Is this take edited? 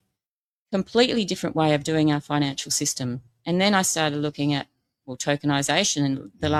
no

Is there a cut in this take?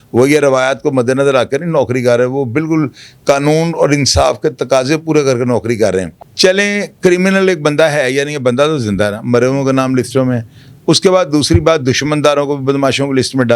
yes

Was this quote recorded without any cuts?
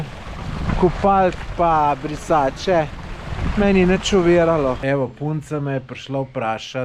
no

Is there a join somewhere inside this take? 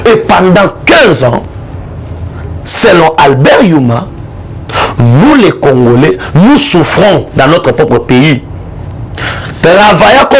no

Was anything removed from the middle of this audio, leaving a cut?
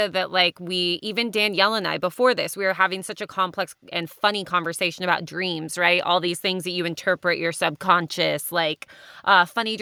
no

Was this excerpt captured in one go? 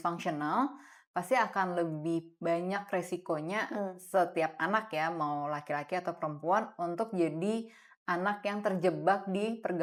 yes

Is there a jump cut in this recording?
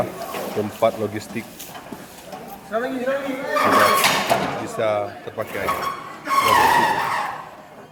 no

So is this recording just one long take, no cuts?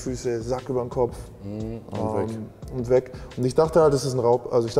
yes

